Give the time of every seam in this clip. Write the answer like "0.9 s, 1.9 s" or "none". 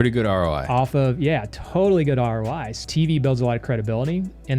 2.8 s